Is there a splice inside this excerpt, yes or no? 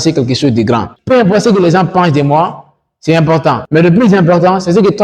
yes